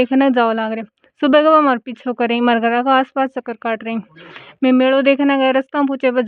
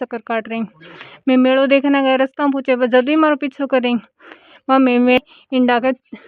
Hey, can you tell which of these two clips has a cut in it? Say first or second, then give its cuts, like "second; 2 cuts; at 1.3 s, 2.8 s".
second; 1 cut; at 5.2 s